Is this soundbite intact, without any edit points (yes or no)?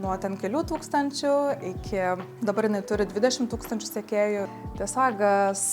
no